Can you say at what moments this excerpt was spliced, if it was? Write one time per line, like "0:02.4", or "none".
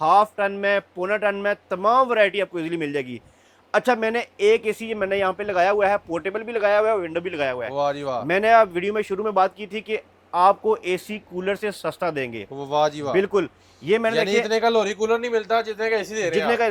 none